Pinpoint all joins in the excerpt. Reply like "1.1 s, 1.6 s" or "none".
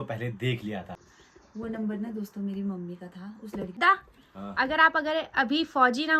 1.0 s, 3.7 s